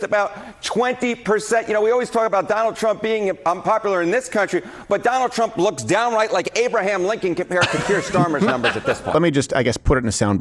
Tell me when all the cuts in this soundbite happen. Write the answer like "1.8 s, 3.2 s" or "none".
9.1 s